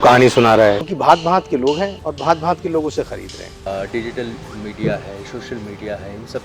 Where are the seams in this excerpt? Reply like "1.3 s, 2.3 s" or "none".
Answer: 0.9 s, 2.0 s, 3.7 s